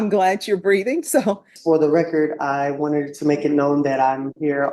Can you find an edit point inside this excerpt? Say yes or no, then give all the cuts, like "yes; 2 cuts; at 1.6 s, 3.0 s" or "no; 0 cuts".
yes; 1 cut; at 1.5 s